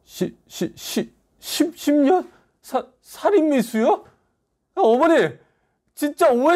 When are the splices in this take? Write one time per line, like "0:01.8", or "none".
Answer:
none

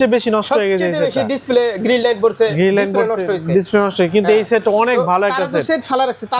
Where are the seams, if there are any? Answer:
none

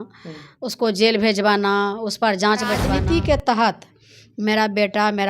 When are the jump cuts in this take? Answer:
0:02.9

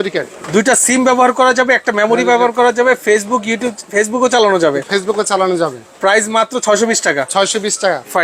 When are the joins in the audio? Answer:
none

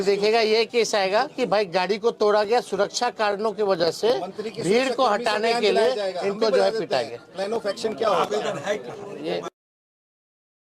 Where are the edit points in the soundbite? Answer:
none

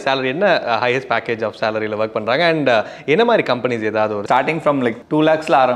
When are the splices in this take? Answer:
0:04.2

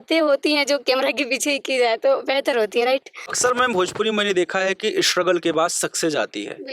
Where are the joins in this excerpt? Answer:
0:03.2

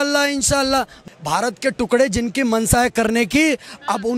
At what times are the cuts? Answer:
0:01.0

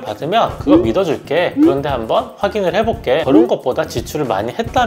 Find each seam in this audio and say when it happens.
0:03.2

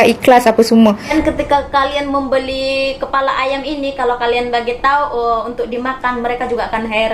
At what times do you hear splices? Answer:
0:01.1

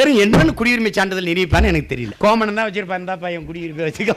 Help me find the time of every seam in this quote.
0:02.0

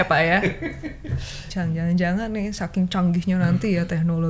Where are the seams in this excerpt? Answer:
0:01.5

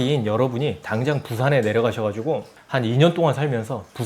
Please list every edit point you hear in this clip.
0:02.6

